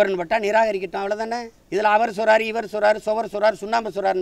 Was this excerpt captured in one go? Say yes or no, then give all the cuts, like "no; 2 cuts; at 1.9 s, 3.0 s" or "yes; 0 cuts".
no; 1 cut; at 1.5 s